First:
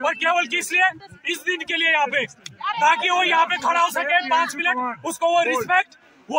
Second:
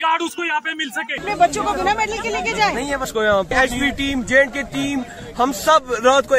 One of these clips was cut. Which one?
second; 2 cuts; at 1.2 s, 3.1 s

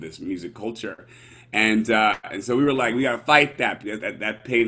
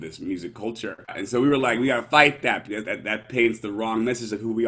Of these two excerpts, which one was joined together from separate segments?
second; 1 cut; at 1.1 s

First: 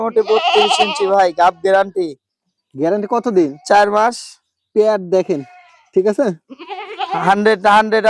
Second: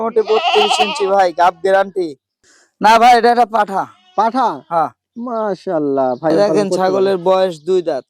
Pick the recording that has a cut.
second; 2 cuts; at 2.6 s, 6.3 s

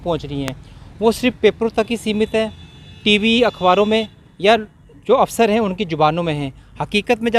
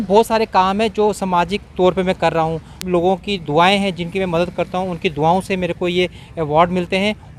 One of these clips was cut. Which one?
second; 1 cut; at 2.8 s

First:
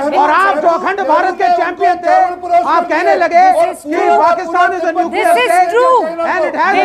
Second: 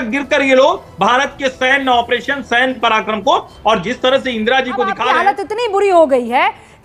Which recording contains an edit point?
second; 1 cut; at 5.1 s

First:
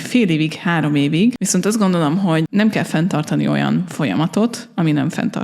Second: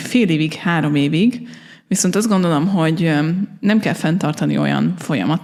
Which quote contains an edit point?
first; 2 cuts; at 1.4 s, 2.5 s

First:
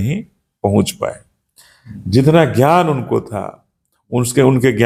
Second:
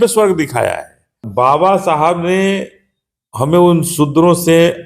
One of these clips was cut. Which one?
second; 1 cut; at 1.2 s

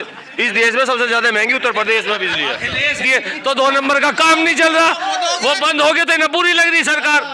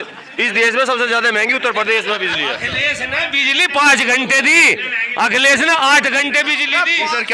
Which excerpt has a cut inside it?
first; 1 cut; at 3.0 s

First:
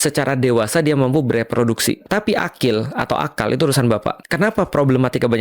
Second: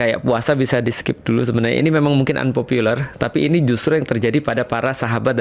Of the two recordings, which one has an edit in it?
first; 2 cuts; at 2.0 s, 4.2 s

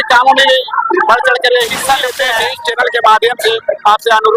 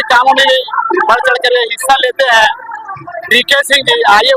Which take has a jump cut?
first; 1 cut; at 2.5 s

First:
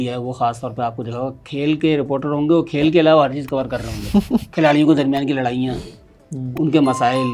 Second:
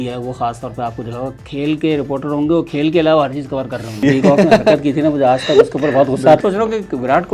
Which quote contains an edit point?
second; 2 cuts; at 4.0 s, 6.4 s

